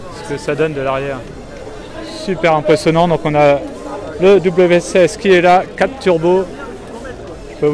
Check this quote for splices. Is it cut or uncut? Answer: uncut